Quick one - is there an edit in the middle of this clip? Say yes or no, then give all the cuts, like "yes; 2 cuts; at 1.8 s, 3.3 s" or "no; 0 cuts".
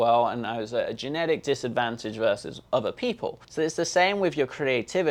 yes; 2 cuts; at 2.5 s, 3.4 s